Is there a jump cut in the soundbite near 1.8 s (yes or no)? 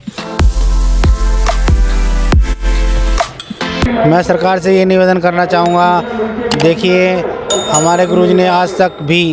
no